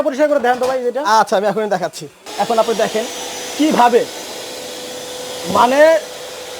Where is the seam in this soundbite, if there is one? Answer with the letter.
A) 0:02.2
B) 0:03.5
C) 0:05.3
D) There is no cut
A